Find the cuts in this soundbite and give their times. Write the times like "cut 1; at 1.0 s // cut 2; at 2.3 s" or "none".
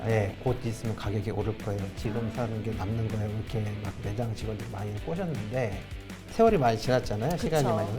cut 1; at 5.9 s